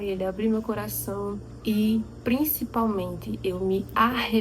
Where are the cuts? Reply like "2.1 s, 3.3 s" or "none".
1.5 s